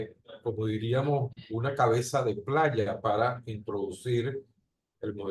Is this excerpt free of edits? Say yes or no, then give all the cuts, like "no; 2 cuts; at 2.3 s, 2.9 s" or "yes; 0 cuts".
yes; 0 cuts